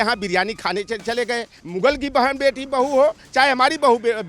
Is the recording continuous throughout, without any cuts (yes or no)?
no